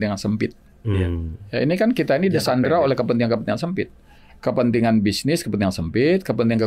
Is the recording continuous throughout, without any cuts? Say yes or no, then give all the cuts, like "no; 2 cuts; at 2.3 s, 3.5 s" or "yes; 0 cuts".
yes; 0 cuts